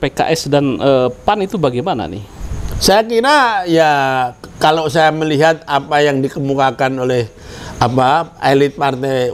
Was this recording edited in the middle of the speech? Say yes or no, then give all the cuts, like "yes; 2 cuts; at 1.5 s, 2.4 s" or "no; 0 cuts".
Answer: no; 0 cuts